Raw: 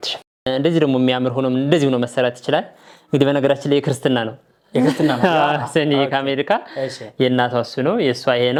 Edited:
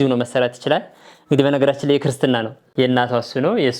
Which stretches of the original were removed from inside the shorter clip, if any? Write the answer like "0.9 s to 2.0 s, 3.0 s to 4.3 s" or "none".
4.4 s to 7.0 s